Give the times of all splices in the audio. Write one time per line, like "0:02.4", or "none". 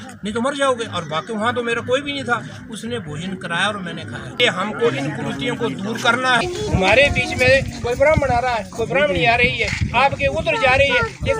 0:04.4
0:06.4